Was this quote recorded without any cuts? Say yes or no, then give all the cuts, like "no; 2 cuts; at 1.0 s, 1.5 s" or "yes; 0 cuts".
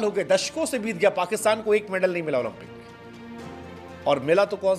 yes; 0 cuts